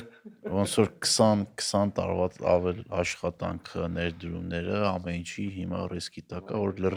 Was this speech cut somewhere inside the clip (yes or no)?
no